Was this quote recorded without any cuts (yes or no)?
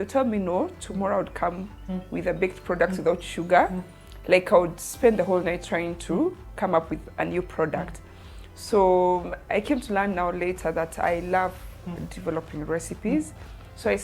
yes